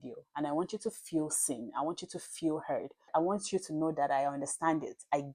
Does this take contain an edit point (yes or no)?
no